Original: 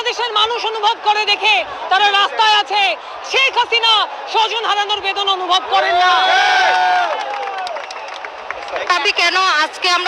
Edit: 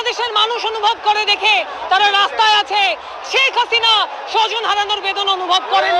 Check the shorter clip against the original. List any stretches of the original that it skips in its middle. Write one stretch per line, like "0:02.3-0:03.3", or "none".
none